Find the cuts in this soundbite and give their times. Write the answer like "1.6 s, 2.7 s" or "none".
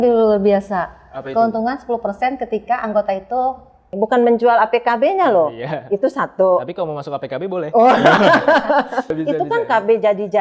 3.9 s, 9.1 s

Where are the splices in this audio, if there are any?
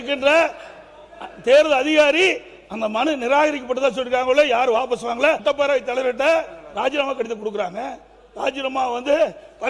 5.4 s

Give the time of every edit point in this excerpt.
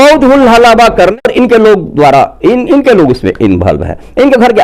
1.2 s

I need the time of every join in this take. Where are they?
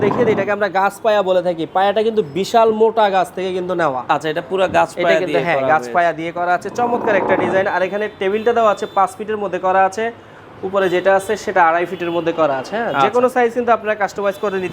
none

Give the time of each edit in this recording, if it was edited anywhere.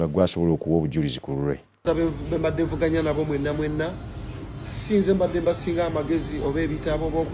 1.8 s

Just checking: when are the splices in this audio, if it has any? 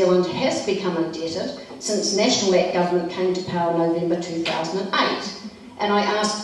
1.1 s

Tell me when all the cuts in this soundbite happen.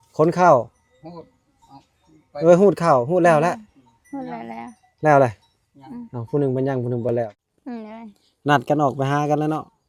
7.3 s

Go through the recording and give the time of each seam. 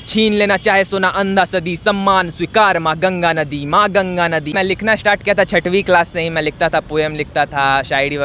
4.5 s

